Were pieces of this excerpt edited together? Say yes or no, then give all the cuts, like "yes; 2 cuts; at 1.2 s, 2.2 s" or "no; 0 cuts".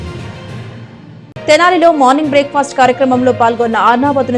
no; 0 cuts